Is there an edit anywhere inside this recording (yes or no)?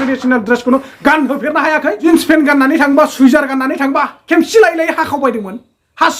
yes